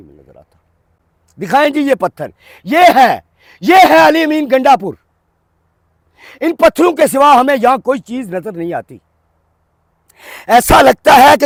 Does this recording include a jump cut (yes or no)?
no